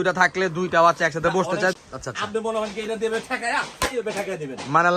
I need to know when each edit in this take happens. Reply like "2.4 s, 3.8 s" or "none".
1.7 s